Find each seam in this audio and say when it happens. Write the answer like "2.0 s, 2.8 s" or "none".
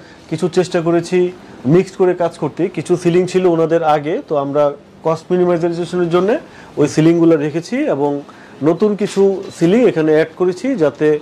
none

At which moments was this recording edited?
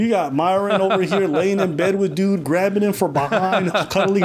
none

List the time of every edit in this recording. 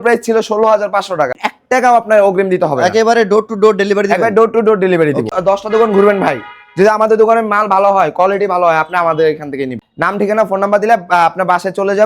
1.4 s, 5.3 s, 9.8 s

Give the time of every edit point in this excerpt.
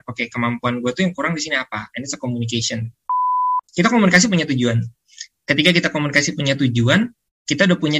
3.3 s

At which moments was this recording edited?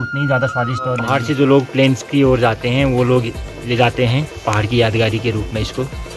1.1 s

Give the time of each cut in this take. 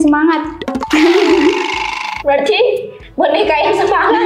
2.1 s

